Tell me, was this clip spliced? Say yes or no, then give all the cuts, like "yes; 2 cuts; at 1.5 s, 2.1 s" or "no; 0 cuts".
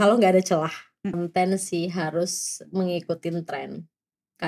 yes; 1 cut; at 1.1 s